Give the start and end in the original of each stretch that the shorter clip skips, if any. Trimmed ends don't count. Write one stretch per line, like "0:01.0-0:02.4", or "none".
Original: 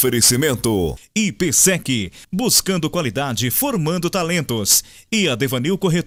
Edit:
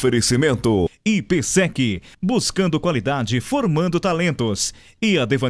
0:01.0-0:01.1